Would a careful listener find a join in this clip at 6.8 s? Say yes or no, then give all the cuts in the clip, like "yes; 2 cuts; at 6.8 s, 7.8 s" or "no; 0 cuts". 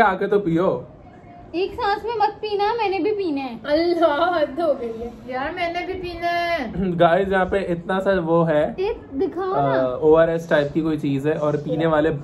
yes; 1 cut; at 6.8 s